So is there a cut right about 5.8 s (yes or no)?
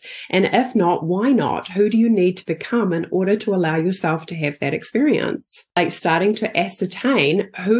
yes